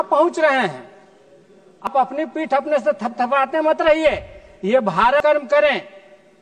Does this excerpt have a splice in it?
yes; 2 cuts; at 1.9 s, 5.2 s

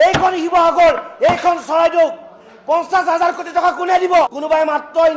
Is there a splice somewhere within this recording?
yes; 1 cut; at 4.2 s

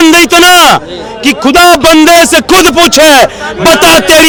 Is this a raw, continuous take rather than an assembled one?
yes; 0 cuts

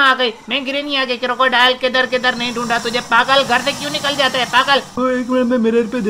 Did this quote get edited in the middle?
yes; 1 cut; at 5.0 s

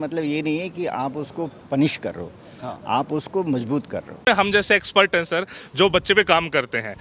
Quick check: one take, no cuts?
no; 1 cut; at 4.3 s

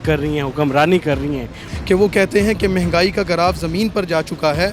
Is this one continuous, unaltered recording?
no; 1 cut; at 1.6 s

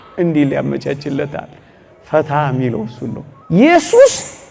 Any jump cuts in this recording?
yes; 1 cut; at 3.3 s

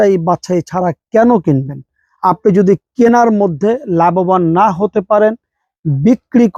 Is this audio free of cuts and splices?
yes; 0 cuts

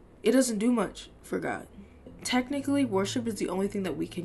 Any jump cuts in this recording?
yes; 1 cut; at 2.1 s

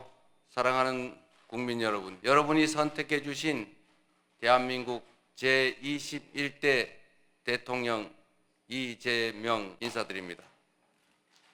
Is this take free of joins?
no; 2 cuts; at 2.1 s, 9.7 s

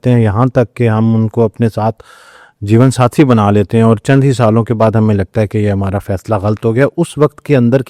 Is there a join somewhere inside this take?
no; 0 cuts

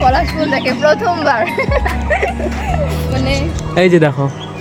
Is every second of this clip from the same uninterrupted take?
yes; 0 cuts

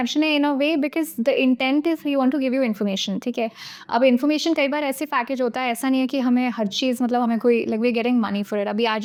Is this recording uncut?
yes; 0 cuts

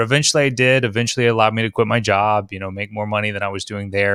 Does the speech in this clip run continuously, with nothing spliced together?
yes; 0 cuts

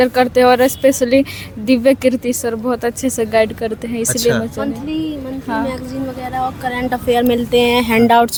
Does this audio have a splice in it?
no; 0 cuts

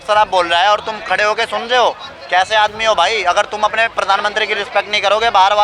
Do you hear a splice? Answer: no; 0 cuts

